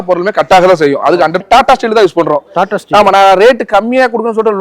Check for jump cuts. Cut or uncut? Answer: cut